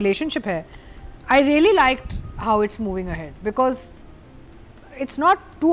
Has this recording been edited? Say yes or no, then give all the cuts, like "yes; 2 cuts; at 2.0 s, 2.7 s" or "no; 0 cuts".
no; 0 cuts